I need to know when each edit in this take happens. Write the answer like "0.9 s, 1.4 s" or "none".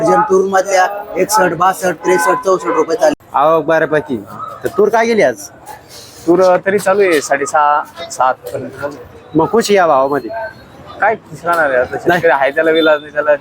3.1 s